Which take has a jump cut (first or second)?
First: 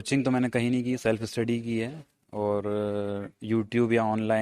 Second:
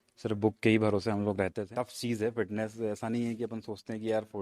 second